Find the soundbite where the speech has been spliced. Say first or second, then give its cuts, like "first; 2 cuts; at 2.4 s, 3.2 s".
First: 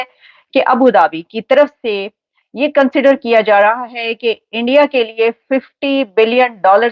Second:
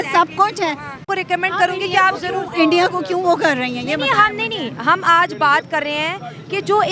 second; 1 cut; at 1.1 s